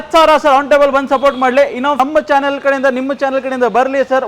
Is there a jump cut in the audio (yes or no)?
yes